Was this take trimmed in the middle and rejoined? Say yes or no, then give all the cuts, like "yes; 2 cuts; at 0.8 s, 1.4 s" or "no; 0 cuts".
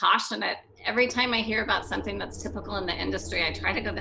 no; 0 cuts